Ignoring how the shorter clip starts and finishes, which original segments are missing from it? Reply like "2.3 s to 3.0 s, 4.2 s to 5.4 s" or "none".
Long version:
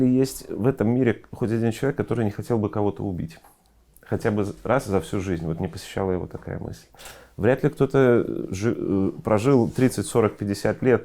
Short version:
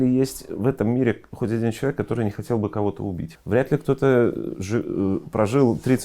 3.3 s to 7.2 s